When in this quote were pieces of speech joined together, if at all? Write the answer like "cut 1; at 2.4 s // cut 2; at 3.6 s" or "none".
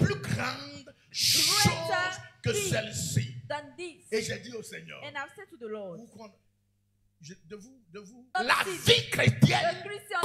cut 1; at 8.3 s